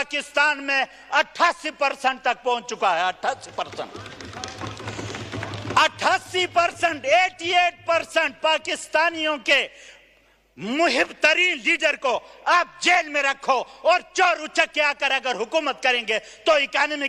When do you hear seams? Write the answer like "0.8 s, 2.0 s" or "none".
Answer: none